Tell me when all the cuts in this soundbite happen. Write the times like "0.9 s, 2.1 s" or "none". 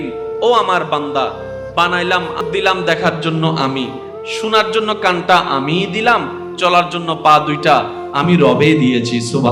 2.4 s